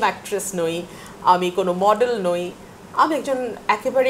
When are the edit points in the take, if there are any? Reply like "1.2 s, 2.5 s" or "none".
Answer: none